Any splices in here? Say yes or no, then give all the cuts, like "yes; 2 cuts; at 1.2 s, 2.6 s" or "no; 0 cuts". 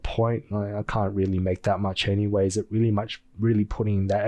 no; 0 cuts